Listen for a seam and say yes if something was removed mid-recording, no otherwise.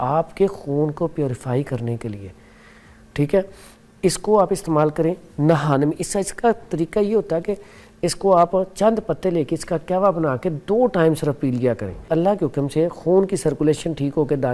yes